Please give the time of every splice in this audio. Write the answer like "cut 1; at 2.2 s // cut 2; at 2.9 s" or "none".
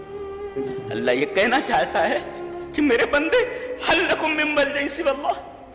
cut 1; at 0.9 s